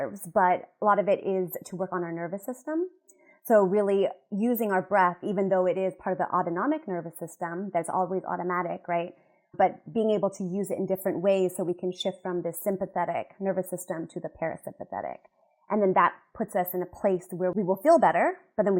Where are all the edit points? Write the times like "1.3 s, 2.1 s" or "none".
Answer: 17.5 s